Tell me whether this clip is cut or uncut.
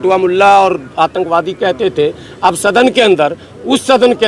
uncut